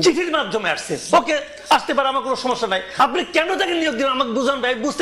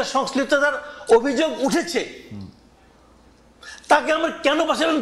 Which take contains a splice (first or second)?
first